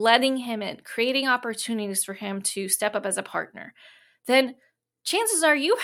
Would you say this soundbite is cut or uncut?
uncut